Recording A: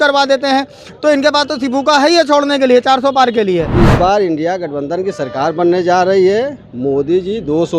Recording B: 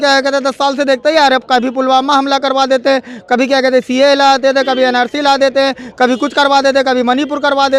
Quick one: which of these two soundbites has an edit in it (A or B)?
A